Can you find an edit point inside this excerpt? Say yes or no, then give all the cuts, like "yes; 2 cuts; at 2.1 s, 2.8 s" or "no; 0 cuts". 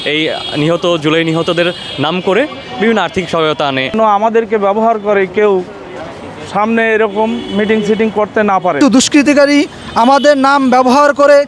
yes; 2 cuts; at 3.8 s, 8.8 s